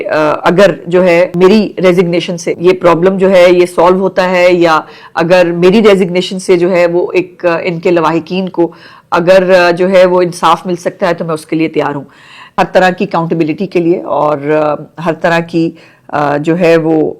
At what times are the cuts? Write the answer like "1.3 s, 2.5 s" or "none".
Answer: 1.3 s, 2.5 s, 12.5 s